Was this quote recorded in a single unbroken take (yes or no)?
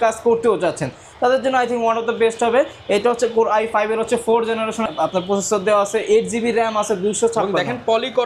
yes